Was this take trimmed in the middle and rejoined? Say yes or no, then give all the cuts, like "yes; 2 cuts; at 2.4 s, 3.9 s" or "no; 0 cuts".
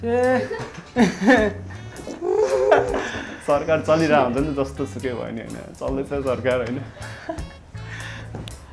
no; 0 cuts